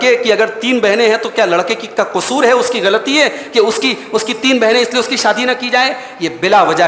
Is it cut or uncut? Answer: uncut